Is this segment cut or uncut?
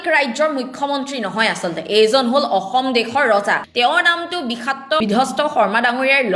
cut